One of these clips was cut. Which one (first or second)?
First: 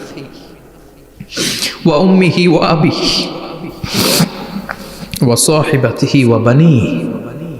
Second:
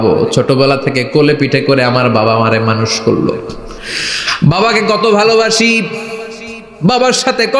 first